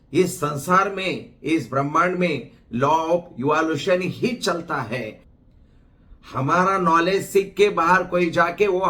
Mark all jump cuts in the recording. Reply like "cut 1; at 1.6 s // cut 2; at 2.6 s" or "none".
cut 1; at 5.2 s

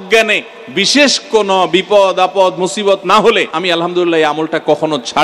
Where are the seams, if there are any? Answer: cut 1; at 3.5 s

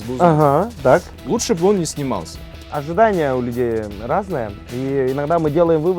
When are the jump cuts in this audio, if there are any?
cut 1; at 1.2 s // cut 2; at 2.7 s

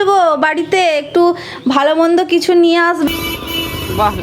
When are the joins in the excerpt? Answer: cut 1; at 3.1 s

